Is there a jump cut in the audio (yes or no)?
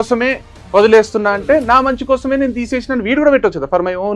no